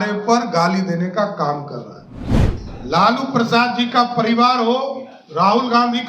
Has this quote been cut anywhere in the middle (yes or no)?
yes